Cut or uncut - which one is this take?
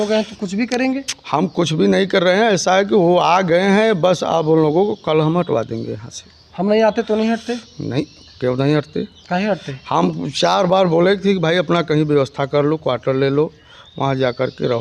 uncut